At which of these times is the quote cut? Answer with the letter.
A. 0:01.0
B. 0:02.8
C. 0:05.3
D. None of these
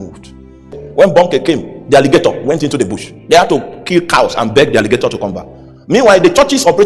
A